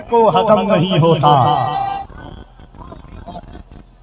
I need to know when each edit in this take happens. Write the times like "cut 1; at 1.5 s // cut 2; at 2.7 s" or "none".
cut 1; at 2.0 s

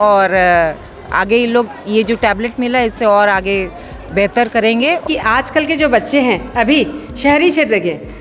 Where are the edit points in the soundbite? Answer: cut 1; at 5.1 s

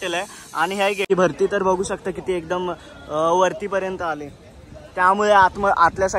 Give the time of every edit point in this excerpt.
cut 1; at 1.1 s

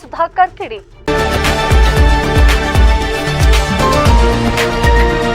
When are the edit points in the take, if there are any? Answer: cut 1; at 1.0 s

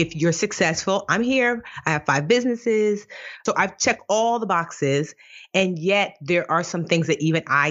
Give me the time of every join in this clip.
cut 1; at 3.4 s

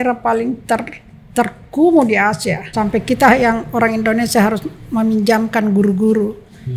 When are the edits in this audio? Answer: cut 1; at 2.6 s

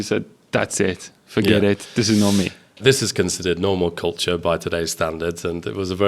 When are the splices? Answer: cut 1; at 2.8 s

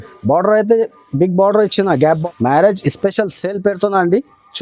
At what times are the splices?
cut 1; at 2.2 s

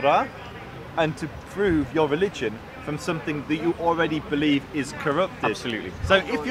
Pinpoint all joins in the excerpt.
none

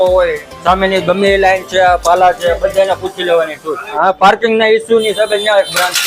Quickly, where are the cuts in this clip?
cut 1; at 3.9 s

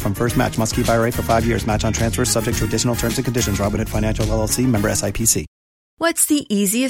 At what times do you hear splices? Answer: cut 1; at 6.0 s

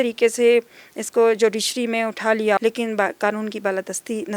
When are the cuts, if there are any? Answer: cut 1; at 2.6 s

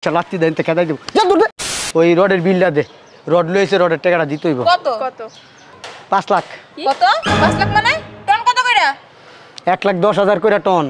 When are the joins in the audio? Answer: cut 1; at 1.6 s

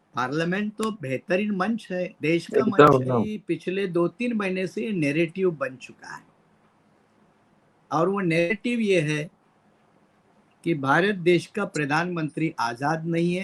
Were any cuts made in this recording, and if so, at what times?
cut 1; at 3.4 s

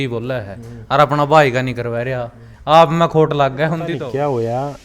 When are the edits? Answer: cut 1; at 3.9 s

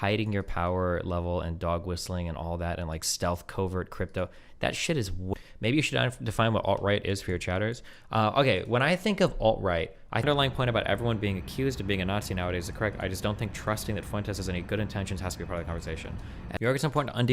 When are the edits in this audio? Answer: cut 1; at 5.3 s // cut 2; at 10.2 s // cut 3; at 16.6 s

